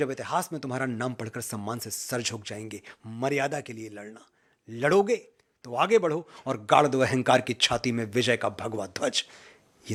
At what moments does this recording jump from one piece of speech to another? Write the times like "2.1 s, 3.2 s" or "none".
none